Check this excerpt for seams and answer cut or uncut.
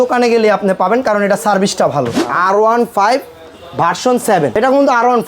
cut